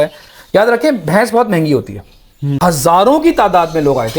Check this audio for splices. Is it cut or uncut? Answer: cut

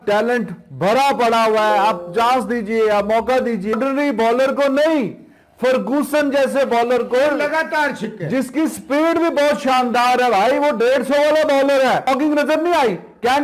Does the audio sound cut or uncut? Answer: cut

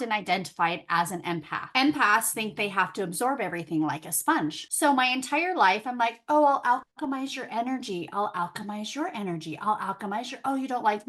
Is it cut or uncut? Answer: cut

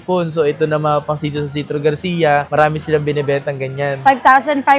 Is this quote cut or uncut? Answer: uncut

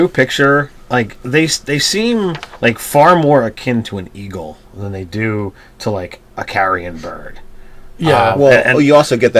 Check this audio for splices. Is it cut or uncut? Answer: uncut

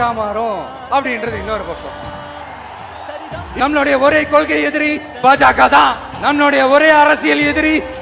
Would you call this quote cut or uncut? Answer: cut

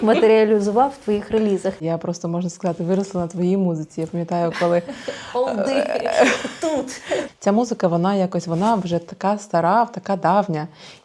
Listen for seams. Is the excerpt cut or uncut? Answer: cut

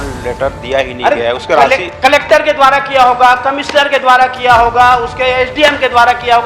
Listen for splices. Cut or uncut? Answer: uncut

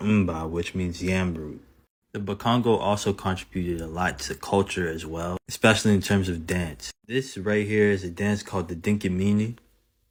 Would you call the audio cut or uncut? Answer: uncut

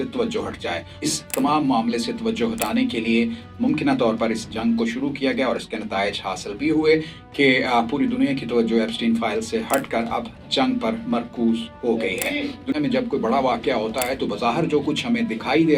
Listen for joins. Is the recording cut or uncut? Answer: cut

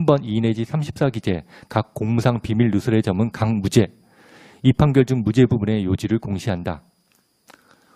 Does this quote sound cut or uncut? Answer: uncut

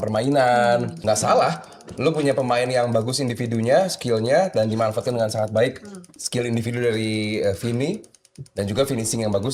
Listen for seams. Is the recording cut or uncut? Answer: cut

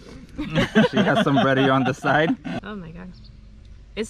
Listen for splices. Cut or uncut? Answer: cut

